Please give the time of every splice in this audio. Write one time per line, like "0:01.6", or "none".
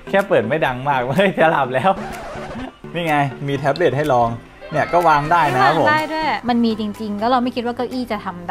0:02.9
0:06.4